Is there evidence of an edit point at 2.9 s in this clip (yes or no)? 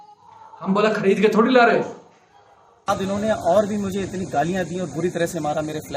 yes